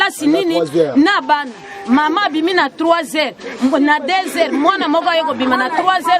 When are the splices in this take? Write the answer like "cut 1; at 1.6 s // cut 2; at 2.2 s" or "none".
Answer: none